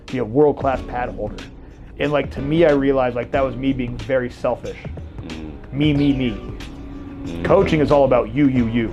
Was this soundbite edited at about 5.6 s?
no; 0 cuts

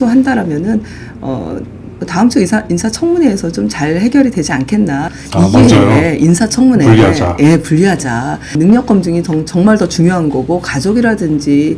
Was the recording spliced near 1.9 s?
no; 2 cuts; at 5.2 s, 8.6 s

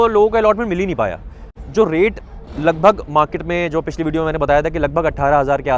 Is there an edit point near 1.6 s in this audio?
yes; 1 cut; at 1.6 s

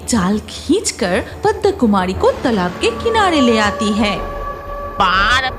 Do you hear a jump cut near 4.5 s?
yes; 1 cut; at 4.5 s

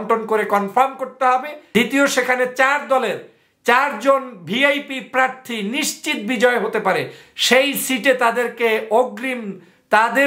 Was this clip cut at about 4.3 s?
no; 1 cut; at 1.6 s

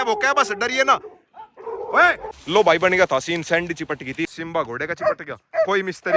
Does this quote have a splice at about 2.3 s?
yes; 2 cuts; at 2.3 s, 4.3 s

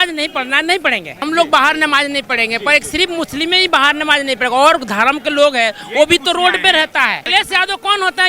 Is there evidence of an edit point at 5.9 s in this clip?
no; 2 cuts; at 1.2 s, 7.2 s

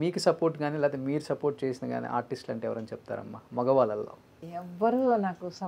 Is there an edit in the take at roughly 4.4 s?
yes; 1 cut; at 4.4 s

